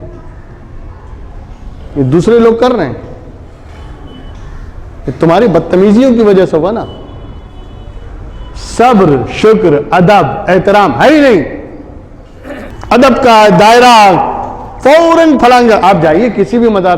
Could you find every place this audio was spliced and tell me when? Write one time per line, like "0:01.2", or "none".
0:12.8